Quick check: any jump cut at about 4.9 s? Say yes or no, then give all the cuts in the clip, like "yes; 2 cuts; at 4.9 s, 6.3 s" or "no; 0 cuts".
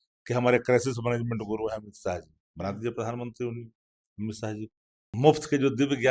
yes; 1 cut; at 4.9 s